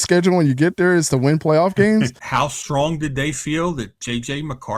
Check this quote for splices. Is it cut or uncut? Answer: cut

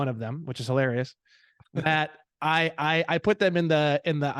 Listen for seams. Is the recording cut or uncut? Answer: uncut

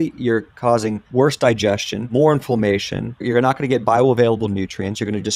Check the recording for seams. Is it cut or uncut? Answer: cut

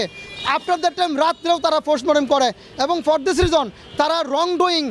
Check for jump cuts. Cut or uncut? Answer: uncut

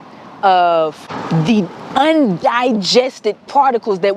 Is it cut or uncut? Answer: cut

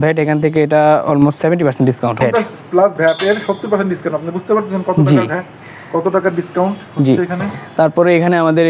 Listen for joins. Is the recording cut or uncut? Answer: uncut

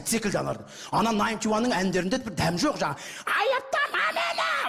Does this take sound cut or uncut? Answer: cut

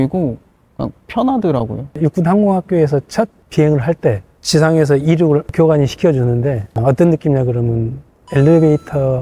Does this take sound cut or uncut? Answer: cut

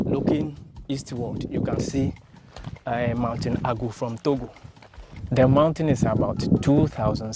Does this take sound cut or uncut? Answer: cut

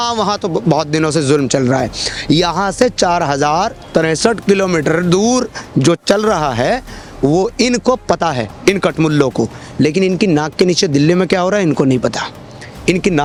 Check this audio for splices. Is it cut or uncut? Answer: uncut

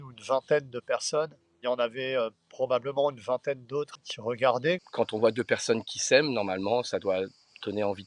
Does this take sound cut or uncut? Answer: cut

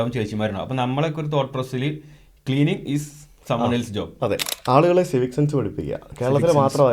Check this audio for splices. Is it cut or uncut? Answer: cut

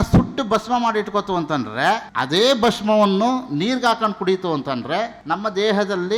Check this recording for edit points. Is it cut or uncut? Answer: cut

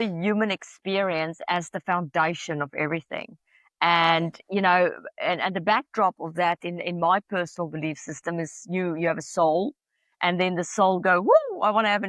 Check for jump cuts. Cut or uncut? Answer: uncut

